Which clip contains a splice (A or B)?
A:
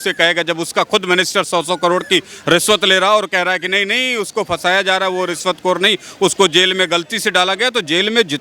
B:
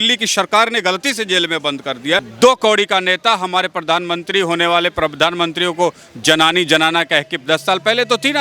B